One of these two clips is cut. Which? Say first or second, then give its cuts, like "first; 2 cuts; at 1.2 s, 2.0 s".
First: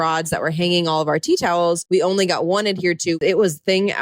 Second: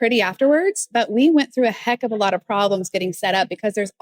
first; 2 cuts; at 1.8 s, 3.2 s